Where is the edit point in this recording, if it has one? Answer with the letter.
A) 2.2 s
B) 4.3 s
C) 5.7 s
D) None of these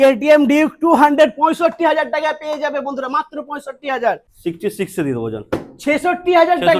B